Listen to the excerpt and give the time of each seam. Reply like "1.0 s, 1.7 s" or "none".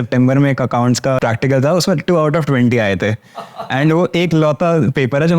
1.2 s